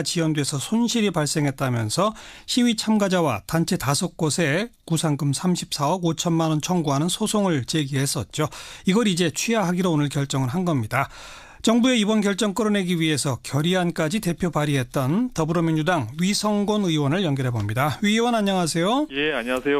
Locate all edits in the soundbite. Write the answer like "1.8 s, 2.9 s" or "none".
none